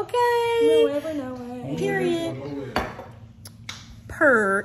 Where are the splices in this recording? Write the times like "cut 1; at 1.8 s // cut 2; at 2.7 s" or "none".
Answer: none